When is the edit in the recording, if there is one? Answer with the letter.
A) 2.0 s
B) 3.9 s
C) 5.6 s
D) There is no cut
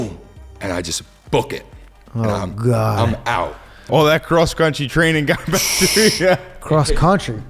B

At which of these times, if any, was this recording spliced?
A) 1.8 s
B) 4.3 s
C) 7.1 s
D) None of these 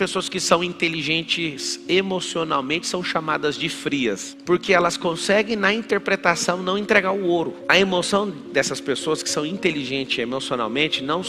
B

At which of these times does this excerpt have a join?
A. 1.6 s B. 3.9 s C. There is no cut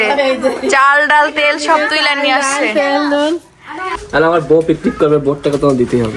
B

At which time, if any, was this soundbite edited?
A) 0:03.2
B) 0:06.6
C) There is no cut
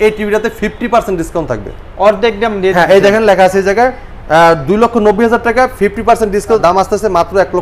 B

